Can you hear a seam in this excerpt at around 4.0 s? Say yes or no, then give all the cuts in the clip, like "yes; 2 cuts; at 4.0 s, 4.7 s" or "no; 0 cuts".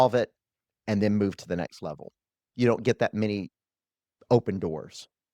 no; 1 cut; at 2.4 s